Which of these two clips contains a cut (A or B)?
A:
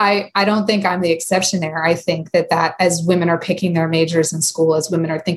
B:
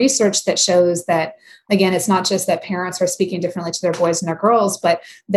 B